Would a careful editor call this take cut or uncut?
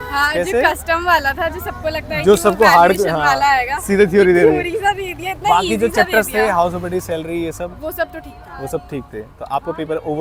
uncut